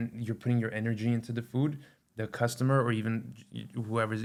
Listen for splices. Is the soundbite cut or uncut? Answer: uncut